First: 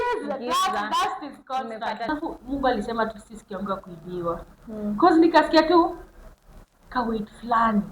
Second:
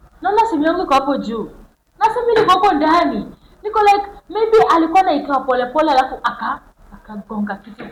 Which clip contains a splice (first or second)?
first